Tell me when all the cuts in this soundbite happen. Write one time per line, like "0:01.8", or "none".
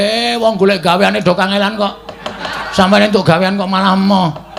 0:02.6